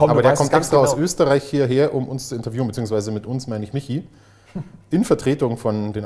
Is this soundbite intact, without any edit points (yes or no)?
yes